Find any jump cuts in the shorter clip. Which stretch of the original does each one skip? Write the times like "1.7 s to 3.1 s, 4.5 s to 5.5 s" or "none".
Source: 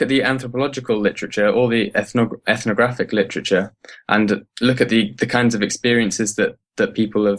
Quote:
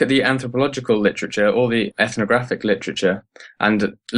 1.9 s to 2.4 s